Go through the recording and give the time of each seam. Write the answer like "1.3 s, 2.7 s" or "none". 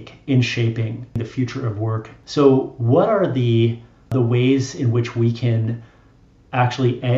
1.2 s, 2.2 s, 4.1 s